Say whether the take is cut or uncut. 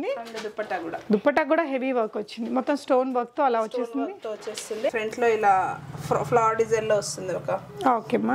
cut